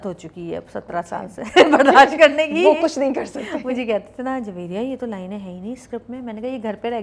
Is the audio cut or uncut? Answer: uncut